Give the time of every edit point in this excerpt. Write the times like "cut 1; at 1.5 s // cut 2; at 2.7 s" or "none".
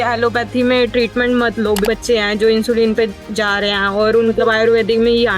cut 1; at 1.8 s // cut 2; at 4.4 s